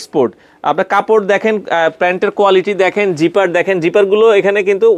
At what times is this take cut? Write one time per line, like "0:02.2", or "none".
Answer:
none